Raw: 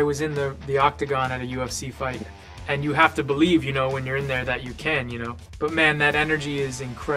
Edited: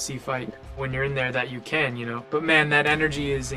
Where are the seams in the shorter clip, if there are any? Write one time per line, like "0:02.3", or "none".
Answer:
0:00.9
0:02.2